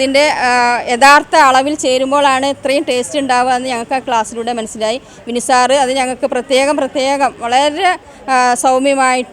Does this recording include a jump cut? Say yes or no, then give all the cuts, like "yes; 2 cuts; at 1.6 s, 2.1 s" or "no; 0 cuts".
no; 0 cuts